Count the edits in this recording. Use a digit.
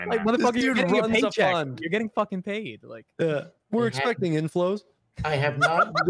1